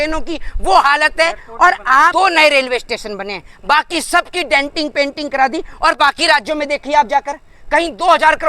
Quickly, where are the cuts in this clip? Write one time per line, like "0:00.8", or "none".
0:02.1

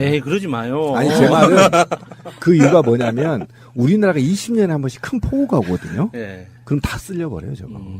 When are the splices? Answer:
0:04.4

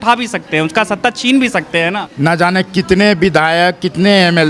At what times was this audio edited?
0:01.9

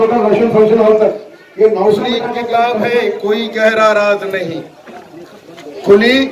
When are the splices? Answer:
0:02.4

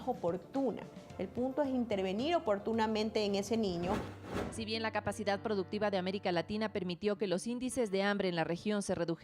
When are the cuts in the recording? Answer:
0:04.3

